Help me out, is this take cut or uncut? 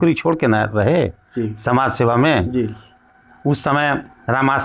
uncut